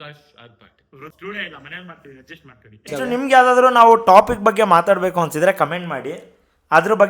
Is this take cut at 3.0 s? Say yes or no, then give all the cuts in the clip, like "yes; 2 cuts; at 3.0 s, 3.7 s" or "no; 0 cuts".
yes; 2 cuts; at 1.1 s, 3.0 s